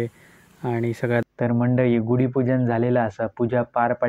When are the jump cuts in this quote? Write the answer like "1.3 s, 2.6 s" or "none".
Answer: 1.2 s